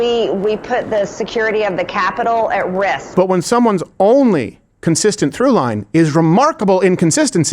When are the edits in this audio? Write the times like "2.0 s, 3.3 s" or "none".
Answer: 3.0 s